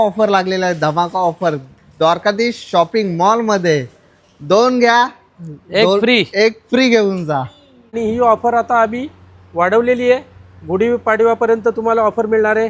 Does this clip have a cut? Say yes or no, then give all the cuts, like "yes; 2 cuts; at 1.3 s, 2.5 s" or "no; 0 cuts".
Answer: yes; 1 cut; at 8.0 s